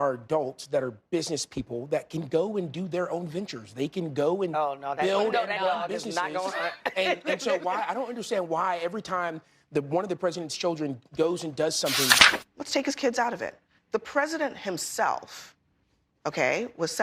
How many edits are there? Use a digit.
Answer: 1